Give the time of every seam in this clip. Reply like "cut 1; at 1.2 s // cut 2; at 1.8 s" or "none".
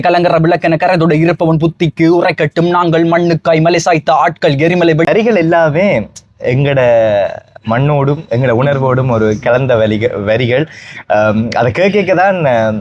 cut 1; at 5.1 s